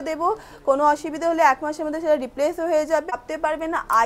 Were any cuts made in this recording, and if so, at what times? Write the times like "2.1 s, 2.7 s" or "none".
3.1 s

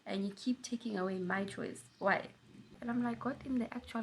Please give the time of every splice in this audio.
2.7 s

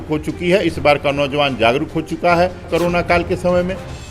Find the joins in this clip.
2.7 s

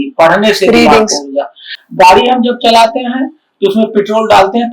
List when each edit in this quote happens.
none

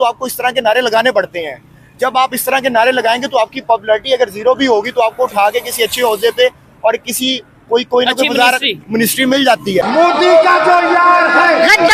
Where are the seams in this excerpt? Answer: 9.8 s

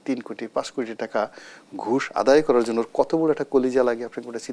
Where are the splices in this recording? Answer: none

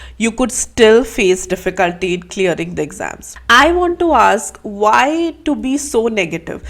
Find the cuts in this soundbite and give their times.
3.5 s

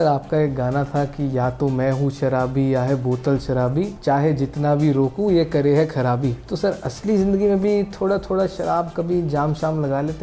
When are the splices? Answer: 4.0 s, 6.4 s

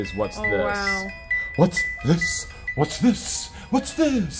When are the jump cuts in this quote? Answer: none

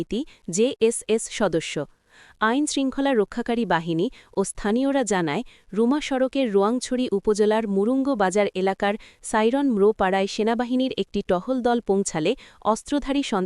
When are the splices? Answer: none

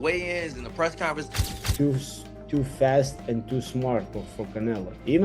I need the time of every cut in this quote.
1.4 s

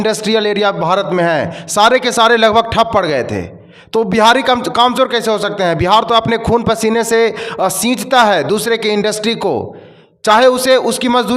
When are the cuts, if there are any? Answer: none

